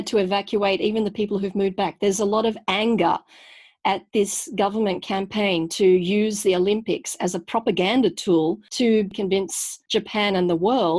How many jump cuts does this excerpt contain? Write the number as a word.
one